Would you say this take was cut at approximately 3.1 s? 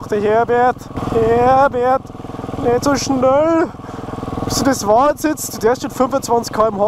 no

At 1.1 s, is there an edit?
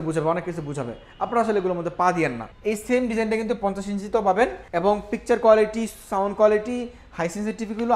no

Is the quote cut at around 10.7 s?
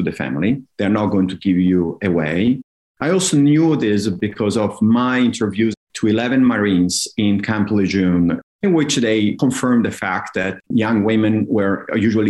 yes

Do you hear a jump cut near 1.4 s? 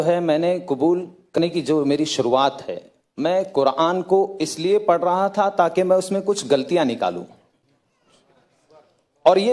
yes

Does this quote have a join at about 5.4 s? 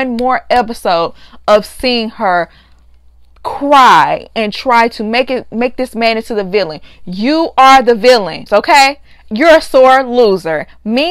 no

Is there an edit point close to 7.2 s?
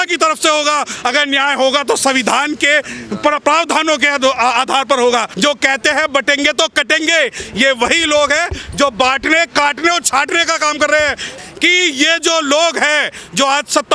no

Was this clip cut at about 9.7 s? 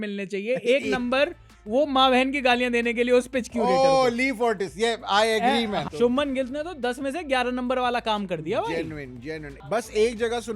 yes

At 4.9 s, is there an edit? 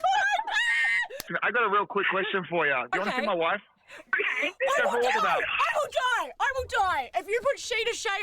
no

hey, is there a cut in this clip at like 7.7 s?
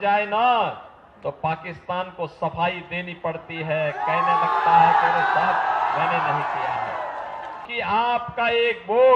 yes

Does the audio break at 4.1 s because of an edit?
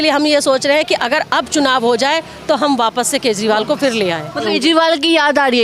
no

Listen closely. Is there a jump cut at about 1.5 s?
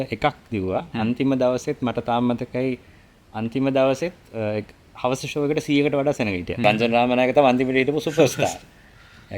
no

